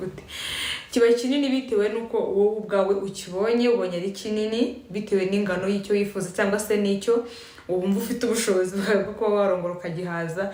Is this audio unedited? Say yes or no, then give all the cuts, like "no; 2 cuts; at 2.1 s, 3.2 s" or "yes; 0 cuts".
yes; 0 cuts